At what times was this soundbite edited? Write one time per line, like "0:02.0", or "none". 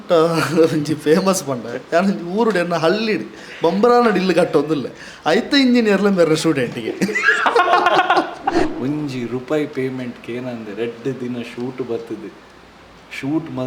0:08.6